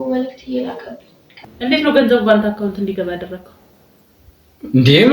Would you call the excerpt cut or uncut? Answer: cut